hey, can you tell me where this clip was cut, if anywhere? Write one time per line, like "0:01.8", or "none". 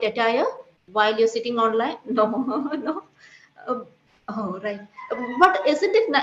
none